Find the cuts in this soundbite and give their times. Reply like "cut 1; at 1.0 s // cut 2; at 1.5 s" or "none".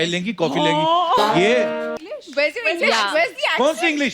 cut 1; at 2.0 s